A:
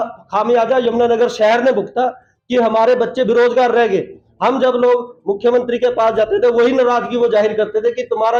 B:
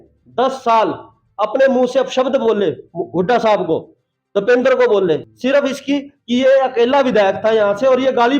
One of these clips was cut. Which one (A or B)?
B